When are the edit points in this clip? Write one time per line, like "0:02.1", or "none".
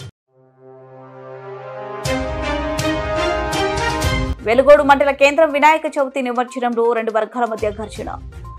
none